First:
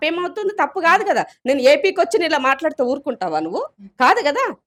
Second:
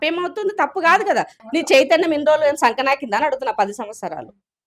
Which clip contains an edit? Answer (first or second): second